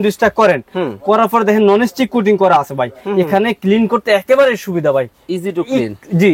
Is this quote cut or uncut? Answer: uncut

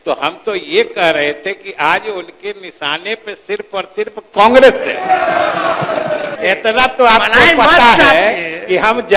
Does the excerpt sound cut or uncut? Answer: cut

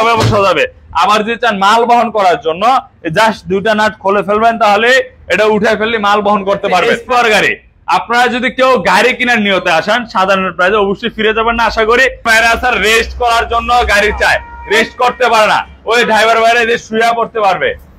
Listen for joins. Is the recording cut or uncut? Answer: cut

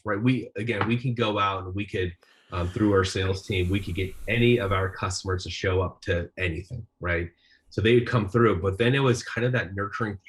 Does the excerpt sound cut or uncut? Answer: uncut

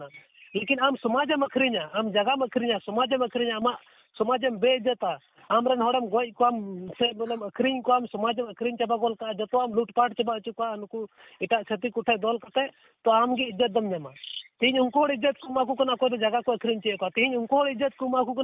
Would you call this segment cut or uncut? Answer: uncut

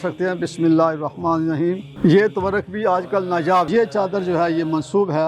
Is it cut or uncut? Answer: cut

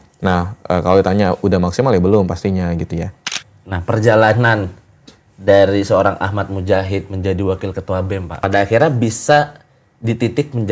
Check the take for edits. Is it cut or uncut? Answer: cut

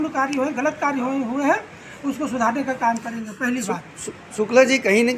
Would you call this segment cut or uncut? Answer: uncut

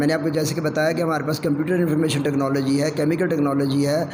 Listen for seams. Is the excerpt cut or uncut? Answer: uncut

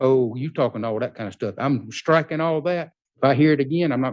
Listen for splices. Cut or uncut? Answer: cut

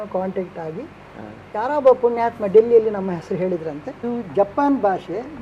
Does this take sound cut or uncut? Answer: cut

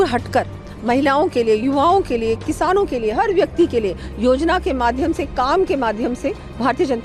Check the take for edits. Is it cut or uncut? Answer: uncut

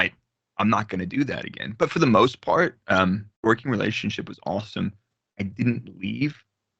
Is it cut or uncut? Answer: cut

